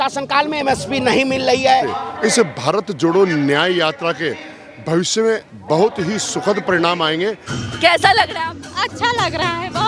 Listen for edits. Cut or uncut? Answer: cut